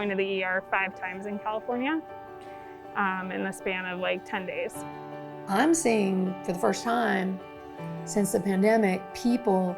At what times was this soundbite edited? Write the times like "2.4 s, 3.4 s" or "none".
4.8 s